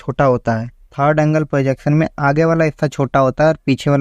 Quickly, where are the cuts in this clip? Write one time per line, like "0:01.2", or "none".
0:00.9